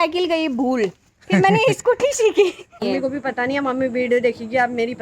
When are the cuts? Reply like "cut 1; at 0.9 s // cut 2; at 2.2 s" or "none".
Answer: cut 1; at 0.9 s // cut 2; at 2.8 s